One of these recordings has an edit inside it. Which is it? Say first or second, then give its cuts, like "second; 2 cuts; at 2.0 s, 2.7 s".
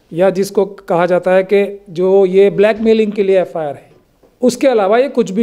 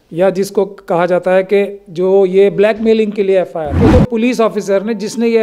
second; 1 cut; at 3.7 s